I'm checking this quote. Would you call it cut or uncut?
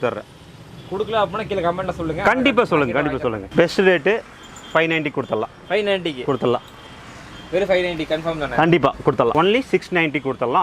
cut